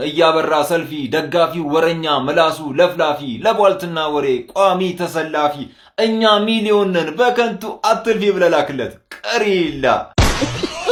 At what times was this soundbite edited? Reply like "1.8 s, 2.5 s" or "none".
none